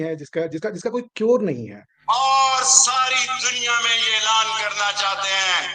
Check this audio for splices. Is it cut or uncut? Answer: cut